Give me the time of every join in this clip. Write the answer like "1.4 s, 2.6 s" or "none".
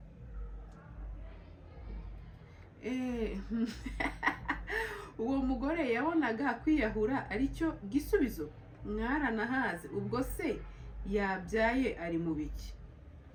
none